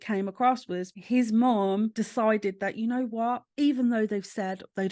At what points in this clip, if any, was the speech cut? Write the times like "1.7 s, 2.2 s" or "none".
0.9 s, 1.9 s, 3.5 s